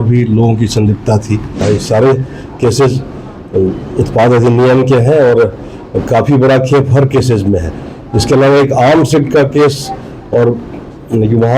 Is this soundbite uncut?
no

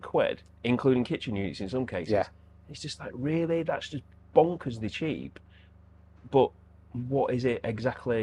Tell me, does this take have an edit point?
no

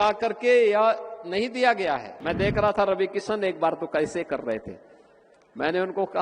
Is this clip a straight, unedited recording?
no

